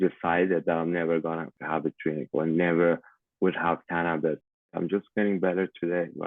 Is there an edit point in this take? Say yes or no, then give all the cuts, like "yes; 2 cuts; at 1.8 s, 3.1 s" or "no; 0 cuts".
yes; 2 cuts; at 1.6 s, 4.7 s